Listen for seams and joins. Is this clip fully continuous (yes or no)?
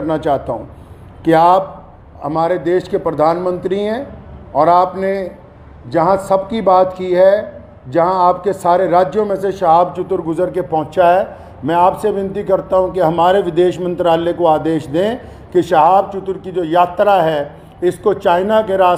yes